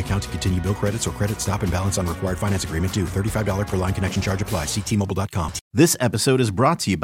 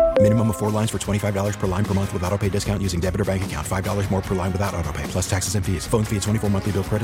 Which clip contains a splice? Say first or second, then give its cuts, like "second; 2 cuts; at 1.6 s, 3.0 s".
first; 1 cut; at 5.6 s